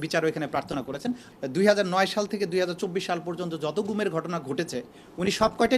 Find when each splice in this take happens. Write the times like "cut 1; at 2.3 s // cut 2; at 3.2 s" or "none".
cut 1; at 1.2 s